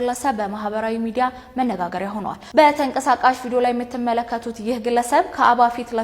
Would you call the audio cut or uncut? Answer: cut